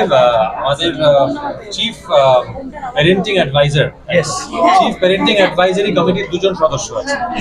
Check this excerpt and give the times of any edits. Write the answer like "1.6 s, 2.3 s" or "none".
none